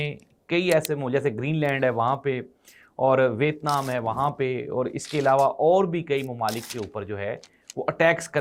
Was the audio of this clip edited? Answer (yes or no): no